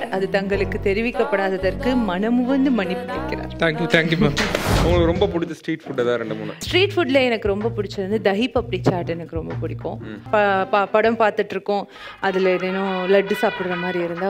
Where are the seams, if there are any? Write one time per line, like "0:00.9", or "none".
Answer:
0:04.8
0:10.1